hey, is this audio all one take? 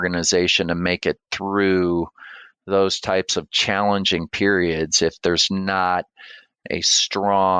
yes; 0 cuts

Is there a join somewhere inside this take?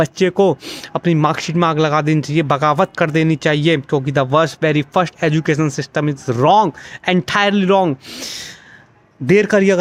no; 0 cuts

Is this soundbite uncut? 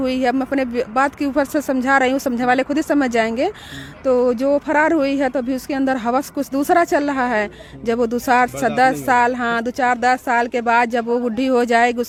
yes; 0 cuts

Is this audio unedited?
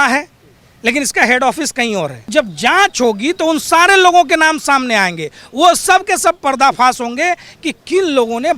no; 1 cut; at 2.3 s

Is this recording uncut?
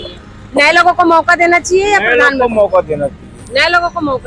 yes; 0 cuts

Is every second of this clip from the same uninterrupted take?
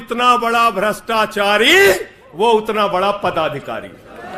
yes; 0 cuts

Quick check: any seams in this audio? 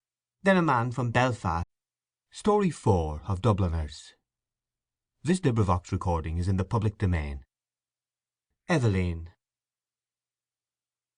no; 0 cuts

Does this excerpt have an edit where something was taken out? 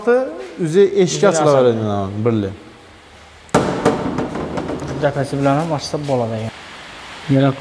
yes; 1 cut; at 6.5 s

